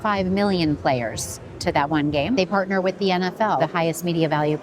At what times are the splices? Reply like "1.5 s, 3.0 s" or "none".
2.4 s, 3.6 s